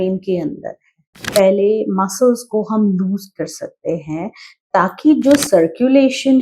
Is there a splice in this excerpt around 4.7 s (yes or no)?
no